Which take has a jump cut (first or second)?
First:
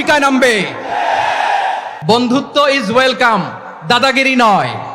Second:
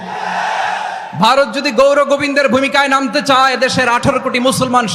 first